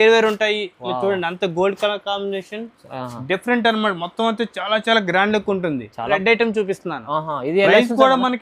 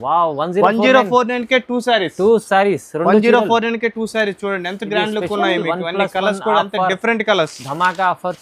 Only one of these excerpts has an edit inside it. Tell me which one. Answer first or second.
first